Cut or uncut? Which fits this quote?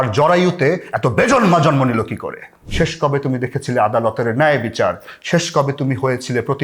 cut